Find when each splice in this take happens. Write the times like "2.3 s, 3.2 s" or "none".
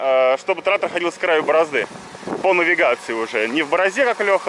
none